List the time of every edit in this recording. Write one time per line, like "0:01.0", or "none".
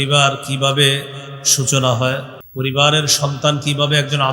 0:02.4